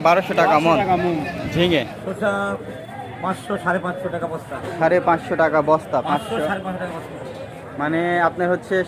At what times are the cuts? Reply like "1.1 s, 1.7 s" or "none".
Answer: 2.0 s